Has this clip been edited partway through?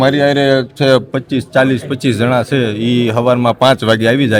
no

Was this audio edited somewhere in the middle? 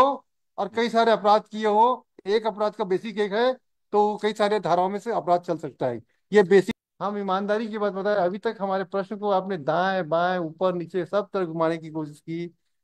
yes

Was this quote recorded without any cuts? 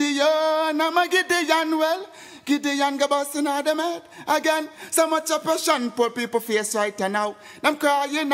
yes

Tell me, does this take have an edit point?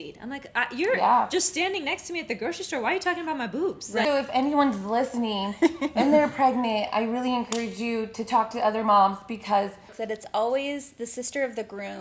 yes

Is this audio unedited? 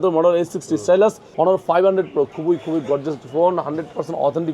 no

